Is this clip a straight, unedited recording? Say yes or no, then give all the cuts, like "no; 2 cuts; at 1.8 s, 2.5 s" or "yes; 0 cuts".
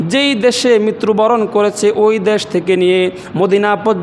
yes; 0 cuts